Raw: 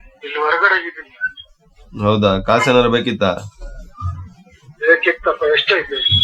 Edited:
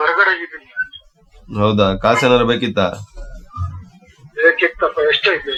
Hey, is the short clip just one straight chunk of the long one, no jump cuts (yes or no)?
yes